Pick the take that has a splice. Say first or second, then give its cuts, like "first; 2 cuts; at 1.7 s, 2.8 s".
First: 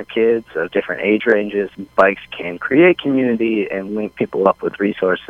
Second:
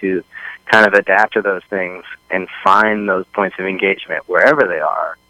first; 1 cut; at 1.8 s